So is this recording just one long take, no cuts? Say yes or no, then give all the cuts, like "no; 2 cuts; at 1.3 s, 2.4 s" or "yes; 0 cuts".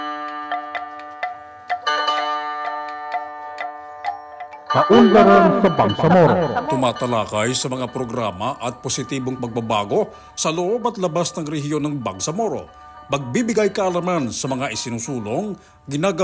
no; 1 cut; at 4.7 s